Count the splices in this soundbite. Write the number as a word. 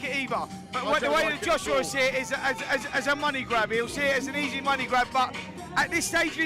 zero